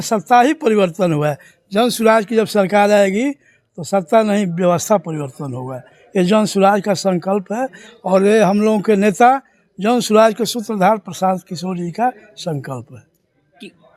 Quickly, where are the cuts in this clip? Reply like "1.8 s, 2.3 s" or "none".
none